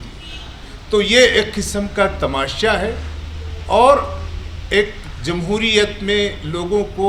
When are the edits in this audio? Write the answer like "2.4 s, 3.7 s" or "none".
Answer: none

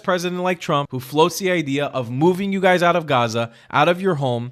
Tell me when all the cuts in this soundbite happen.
1.0 s

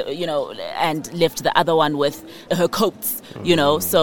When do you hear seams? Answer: 2.5 s

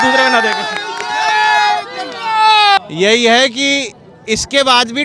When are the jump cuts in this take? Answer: 2.9 s

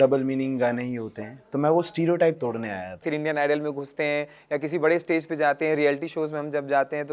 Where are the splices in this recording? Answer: 3.1 s

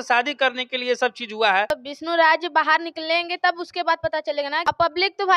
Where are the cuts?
1.7 s, 4.6 s

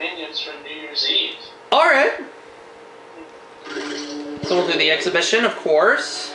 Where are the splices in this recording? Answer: 3.7 s

